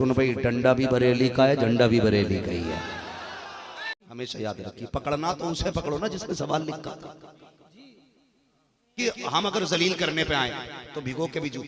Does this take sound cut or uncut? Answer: cut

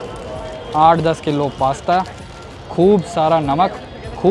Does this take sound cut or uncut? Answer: uncut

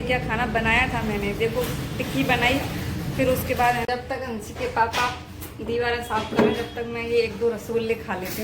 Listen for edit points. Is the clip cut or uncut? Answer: cut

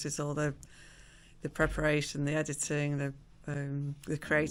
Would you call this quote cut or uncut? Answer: uncut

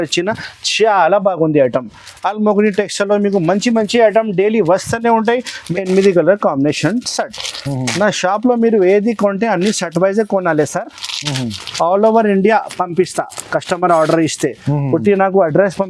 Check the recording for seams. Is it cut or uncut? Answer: cut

